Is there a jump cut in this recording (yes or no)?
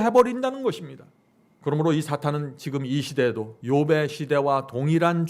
yes